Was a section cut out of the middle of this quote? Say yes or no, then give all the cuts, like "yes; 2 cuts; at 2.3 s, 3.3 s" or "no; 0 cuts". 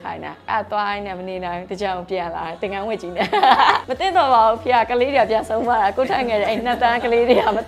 yes; 1 cut; at 3.9 s